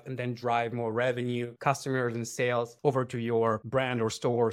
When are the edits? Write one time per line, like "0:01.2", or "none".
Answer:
none